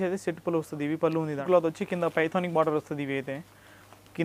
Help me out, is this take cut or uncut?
cut